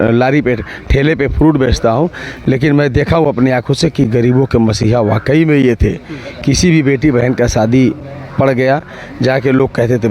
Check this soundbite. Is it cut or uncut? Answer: uncut